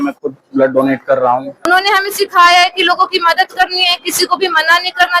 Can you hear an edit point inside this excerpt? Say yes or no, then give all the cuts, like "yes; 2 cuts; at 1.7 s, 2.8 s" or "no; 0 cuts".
yes; 1 cut; at 1.7 s